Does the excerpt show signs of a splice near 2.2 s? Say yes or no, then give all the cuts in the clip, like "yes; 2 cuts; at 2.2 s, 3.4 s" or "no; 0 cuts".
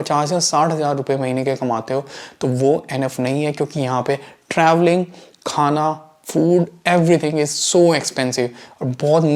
no; 0 cuts